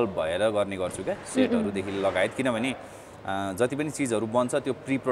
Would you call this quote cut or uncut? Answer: uncut